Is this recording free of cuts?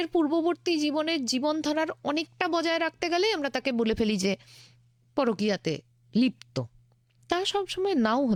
yes; 0 cuts

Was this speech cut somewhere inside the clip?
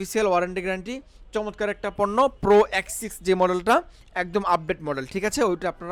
no; 0 cuts

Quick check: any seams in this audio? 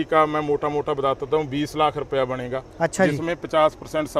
no; 0 cuts

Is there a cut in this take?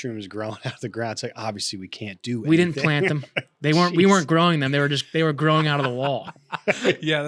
no; 0 cuts

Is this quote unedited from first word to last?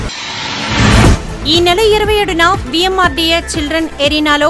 no; 1 cut; at 1.1 s

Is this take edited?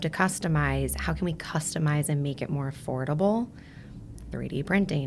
no; 0 cuts

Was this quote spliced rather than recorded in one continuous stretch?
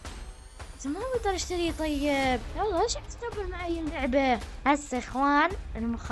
yes; 2 cuts; at 2.5 s, 4.5 s

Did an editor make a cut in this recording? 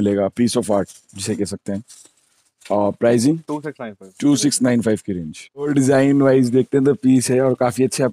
no; 0 cuts

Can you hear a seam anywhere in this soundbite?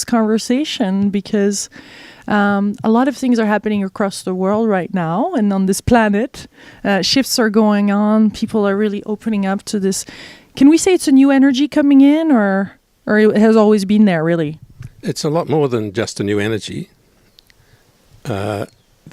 yes; 1 cut; at 3.3 s

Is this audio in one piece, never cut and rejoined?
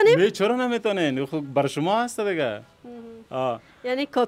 yes; 0 cuts

